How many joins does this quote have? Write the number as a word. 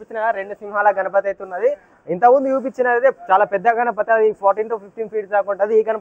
zero